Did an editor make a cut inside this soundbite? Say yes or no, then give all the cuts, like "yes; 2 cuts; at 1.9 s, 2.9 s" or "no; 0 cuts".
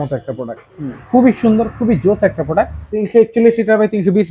yes; 1 cut; at 2.8 s